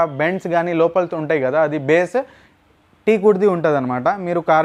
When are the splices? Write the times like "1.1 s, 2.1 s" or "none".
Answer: none